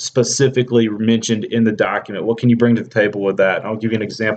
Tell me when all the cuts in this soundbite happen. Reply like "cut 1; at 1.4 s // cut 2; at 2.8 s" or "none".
cut 1; at 2.9 s